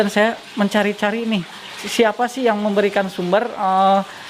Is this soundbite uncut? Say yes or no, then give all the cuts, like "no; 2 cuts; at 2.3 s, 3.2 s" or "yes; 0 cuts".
no; 1 cut; at 1.8 s